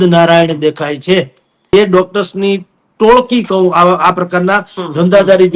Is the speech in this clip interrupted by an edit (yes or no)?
yes